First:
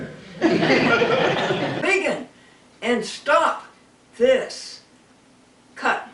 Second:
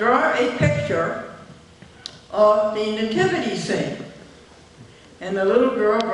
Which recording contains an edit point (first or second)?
first